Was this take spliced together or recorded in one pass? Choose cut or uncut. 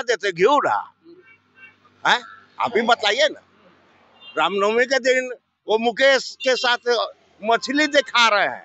uncut